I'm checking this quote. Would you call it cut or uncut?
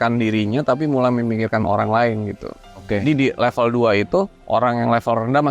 cut